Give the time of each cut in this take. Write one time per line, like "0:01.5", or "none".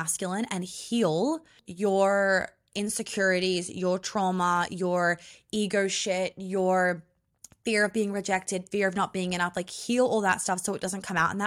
0:01.6